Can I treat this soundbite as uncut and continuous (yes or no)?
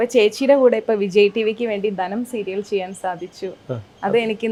yes